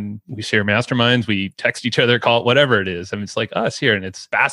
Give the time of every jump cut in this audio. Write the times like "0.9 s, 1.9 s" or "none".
none